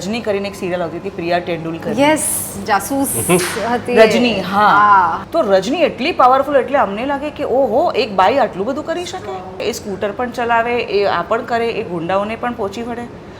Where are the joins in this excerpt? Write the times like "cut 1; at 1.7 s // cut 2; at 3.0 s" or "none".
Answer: cut 1; at 5.2 s // cut 2; at 9.6 s